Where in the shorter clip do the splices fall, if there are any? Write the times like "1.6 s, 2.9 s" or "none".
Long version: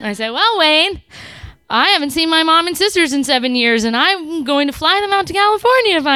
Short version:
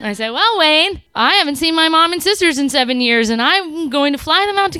1.0 s